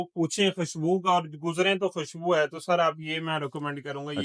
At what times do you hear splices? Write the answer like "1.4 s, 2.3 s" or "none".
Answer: none